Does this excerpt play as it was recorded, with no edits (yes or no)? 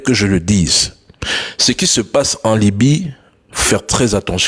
yes